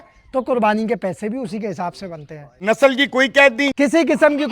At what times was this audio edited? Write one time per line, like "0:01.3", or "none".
0:02.5
0:03.7